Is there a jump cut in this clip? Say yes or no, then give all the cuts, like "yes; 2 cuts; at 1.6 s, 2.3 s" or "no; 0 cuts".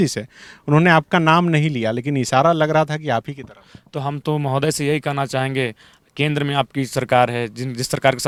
no; 0 cuts